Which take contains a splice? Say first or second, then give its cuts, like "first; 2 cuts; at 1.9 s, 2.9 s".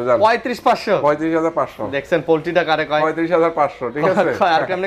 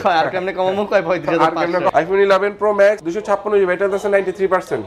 second; 2 cuts; at 1.9 s, 3.1 s